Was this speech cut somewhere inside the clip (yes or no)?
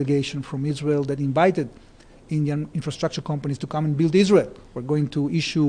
no